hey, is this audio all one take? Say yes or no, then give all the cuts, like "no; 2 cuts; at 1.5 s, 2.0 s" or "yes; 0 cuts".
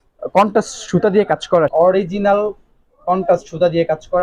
no; 1 cut; at 1.7 s